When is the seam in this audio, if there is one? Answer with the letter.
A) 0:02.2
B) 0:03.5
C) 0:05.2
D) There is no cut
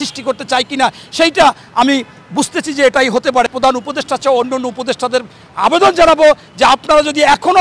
B